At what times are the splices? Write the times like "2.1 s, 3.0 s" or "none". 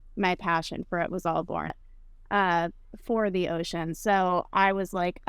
1.8 s